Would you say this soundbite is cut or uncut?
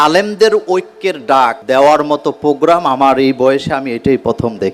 cut